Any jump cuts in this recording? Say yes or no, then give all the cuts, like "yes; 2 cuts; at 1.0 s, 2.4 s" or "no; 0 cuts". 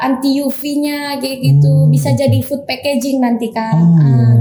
no; 0 cuts